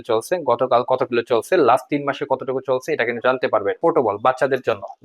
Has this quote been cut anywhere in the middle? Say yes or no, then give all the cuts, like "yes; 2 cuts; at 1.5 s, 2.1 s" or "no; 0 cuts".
yes; 1 cut; at 3.8 s